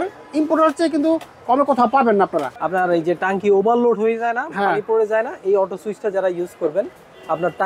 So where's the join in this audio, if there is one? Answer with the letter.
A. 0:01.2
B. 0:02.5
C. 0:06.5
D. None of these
B